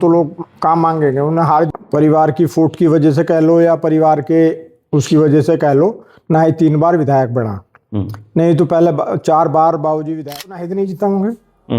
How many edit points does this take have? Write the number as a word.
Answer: two